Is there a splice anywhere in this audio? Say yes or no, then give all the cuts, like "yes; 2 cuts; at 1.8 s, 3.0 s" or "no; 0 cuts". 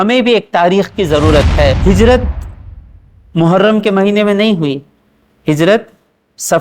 yes; 1 cut; at 1.8 s